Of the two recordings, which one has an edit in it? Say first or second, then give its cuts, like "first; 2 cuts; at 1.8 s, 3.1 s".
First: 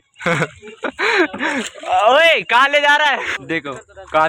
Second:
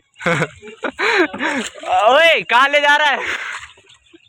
first; 1 cut; at 3.3 s